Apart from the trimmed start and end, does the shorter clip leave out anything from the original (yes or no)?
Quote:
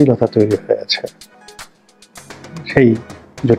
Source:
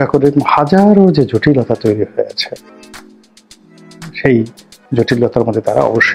no